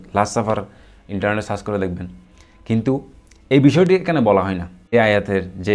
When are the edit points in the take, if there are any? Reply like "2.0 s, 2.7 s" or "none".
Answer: 4.8 s